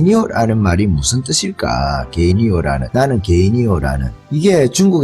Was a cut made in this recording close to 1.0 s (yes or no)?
no